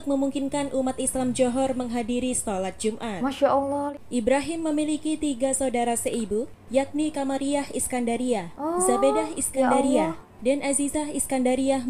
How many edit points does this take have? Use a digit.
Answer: 1